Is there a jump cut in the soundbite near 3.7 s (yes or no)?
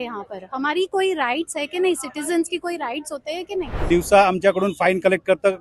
yes